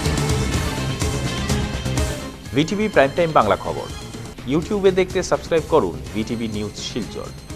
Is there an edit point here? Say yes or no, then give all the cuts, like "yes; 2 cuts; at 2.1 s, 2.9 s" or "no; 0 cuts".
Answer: no; 0 cuts